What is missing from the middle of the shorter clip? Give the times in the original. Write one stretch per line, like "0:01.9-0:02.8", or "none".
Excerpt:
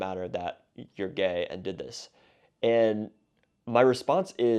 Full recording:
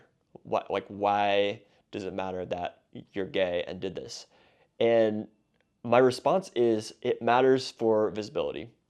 none